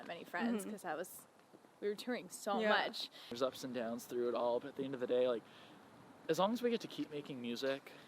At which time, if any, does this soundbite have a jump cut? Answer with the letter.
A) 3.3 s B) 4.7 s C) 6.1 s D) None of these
A